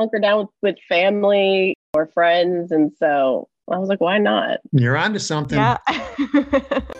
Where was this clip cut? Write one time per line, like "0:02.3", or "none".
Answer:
0:04.6
0:05.6